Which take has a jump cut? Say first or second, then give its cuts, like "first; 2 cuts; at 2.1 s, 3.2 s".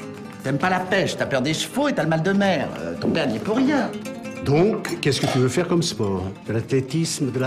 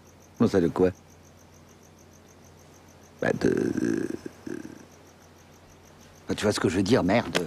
first; 1 cut; at 2.4 s